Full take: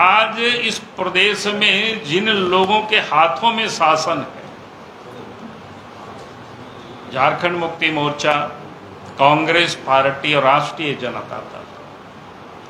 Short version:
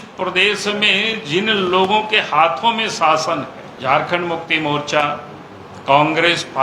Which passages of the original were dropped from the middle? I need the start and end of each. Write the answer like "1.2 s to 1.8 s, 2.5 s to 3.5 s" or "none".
4.4 s to 6.9 s